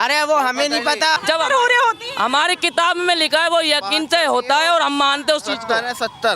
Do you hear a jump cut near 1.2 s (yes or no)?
yes